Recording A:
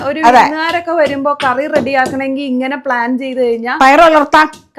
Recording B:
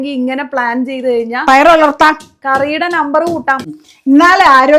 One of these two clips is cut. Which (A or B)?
B